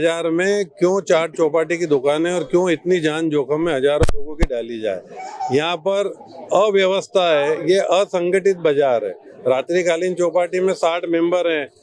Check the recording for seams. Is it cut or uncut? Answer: uncut